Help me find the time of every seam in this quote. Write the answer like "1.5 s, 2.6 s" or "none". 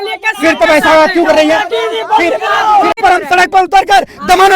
3.0 s